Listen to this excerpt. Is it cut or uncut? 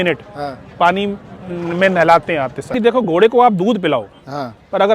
cut